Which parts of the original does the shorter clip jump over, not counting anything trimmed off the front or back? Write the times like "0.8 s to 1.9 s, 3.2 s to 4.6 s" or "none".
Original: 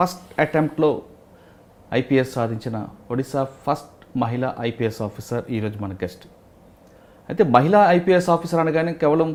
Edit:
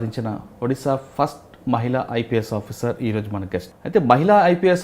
6.2 s to 7.2 s